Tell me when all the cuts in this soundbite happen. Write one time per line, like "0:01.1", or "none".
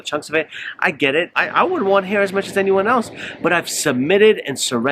0:01.4